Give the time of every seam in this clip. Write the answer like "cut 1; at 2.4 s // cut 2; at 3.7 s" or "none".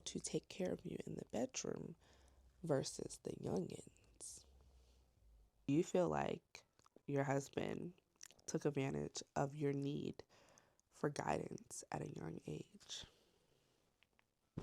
cut 1; at 5.7 s